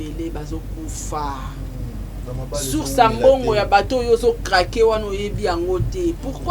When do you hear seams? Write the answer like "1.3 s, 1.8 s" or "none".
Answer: none

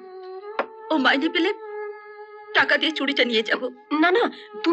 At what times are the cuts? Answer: none

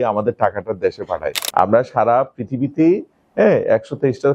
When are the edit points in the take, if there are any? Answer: 1.4 s

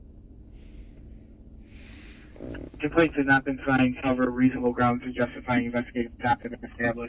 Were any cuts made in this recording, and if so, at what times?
none

